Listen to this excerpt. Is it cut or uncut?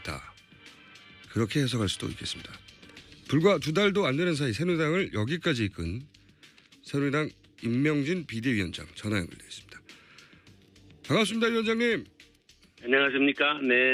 uncut